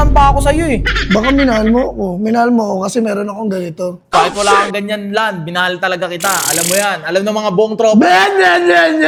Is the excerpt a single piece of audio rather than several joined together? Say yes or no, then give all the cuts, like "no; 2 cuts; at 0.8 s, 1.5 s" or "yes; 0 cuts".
yes; 0 cuts